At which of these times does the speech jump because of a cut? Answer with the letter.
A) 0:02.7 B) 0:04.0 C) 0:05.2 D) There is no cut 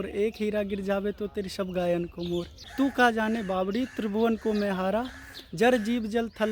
A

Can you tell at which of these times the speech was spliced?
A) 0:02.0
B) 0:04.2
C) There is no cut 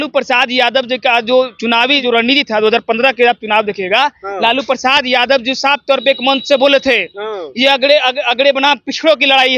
A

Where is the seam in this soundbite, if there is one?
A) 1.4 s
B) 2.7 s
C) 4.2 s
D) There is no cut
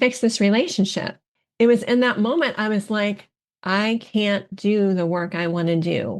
A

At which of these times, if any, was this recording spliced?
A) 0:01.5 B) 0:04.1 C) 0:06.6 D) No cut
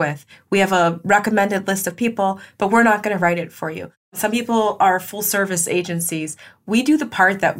B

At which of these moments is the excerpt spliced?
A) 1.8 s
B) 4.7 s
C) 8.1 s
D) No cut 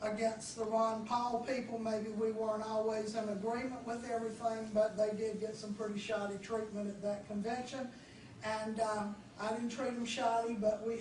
A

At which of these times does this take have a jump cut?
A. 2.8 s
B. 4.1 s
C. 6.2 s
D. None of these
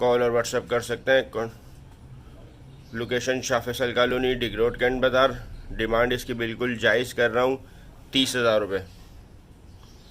D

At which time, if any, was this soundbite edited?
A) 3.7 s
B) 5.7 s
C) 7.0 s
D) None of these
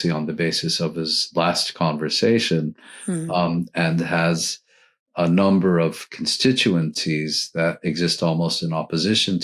C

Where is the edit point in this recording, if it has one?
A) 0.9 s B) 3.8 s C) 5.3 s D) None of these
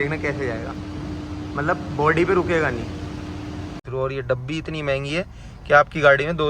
B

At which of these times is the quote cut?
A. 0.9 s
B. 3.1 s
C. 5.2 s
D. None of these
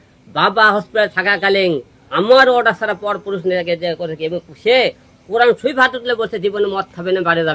D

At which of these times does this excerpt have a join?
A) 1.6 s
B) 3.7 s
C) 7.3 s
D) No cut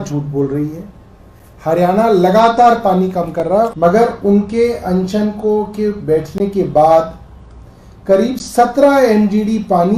B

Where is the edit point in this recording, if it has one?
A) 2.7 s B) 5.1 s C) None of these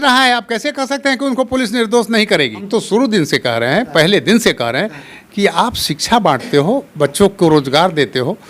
A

